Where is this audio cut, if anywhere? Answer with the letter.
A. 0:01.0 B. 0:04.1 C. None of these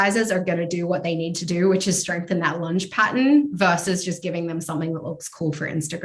C